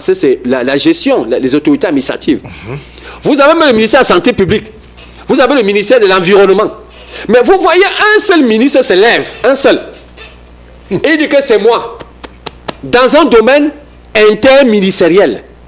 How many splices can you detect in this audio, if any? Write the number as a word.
zero